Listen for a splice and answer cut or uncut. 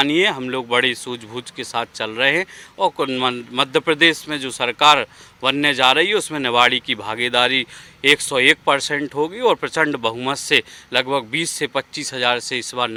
uncut